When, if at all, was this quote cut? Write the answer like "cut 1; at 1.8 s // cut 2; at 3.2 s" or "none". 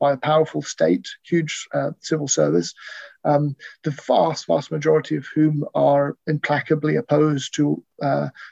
none